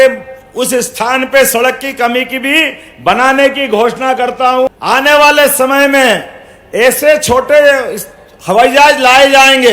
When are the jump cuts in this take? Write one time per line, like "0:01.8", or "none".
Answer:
0:04.7